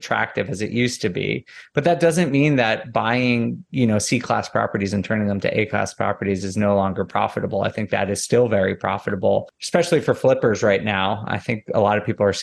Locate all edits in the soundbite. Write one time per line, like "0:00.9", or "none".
0:09.6

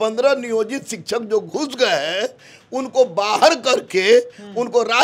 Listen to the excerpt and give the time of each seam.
none

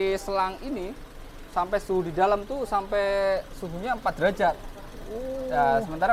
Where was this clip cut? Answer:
none

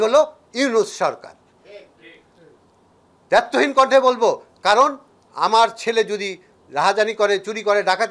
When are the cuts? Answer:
none

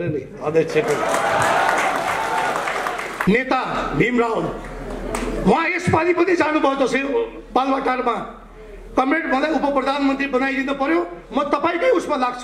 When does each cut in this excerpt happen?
0:03.2

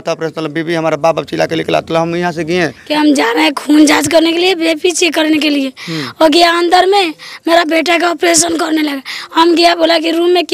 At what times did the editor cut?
0:02.8

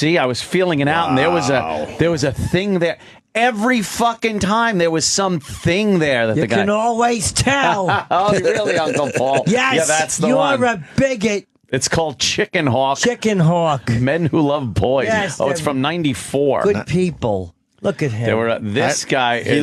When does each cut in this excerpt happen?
none

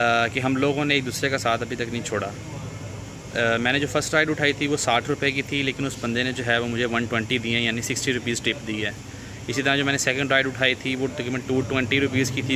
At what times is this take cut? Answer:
none

